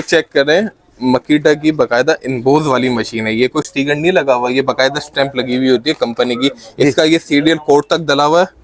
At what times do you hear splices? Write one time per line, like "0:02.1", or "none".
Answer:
none